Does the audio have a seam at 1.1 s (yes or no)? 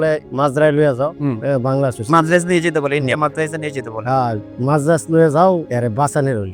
no